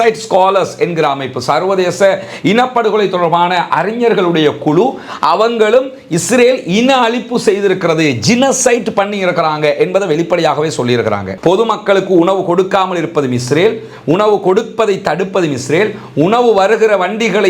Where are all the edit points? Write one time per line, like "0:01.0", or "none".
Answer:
0:11.3

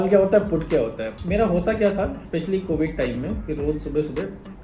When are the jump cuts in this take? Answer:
0:01.1

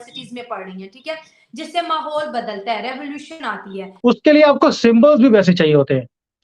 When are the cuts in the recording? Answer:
0:03.9

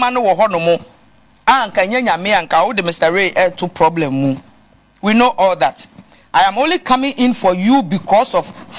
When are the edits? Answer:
none

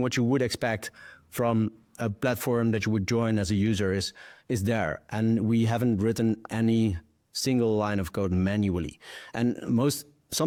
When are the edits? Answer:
none

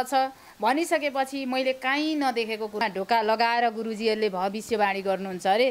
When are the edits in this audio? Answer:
0:02.8

